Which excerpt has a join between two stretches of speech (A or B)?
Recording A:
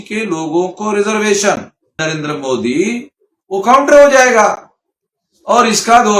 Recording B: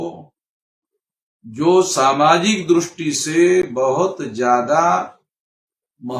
A